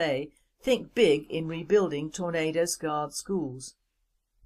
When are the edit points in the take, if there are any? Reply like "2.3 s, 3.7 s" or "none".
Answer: none

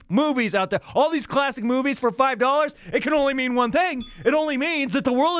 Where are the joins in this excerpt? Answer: none

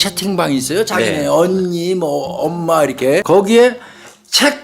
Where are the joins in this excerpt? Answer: 3.2 s

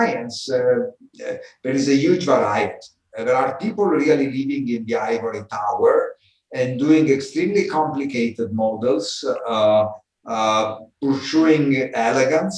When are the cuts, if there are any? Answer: none

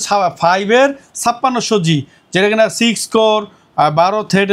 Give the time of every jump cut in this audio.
none

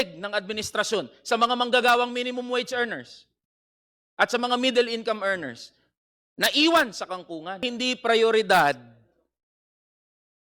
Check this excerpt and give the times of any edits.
7.7 s

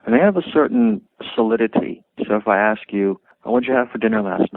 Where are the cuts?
1.1 s, 2.1 s, 3.3 s

